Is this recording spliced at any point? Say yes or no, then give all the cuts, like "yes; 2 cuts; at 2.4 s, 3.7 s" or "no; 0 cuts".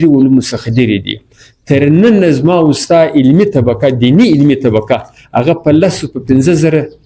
no; 0 cuts